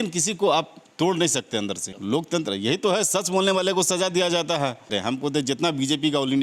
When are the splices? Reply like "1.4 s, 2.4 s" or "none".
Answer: 1.9 s, 4.9 s